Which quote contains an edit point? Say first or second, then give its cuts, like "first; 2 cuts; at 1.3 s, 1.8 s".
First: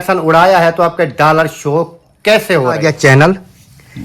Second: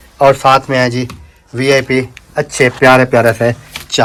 first; 1 cut; at 2.8 s